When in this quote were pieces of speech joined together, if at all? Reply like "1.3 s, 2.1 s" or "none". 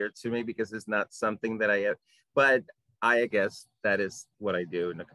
3.3 s, 4.3 s